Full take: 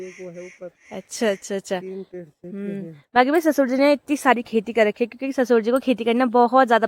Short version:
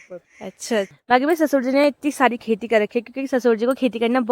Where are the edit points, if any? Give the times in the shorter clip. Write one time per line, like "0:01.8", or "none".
0:00.9